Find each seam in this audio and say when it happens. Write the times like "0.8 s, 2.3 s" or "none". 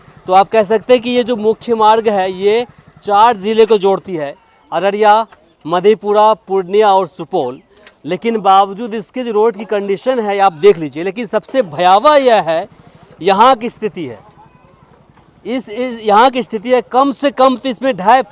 none

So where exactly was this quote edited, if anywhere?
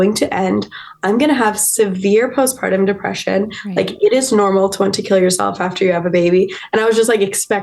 none

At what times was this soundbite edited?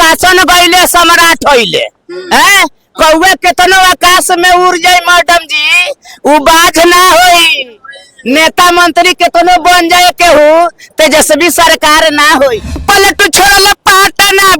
12.8 s

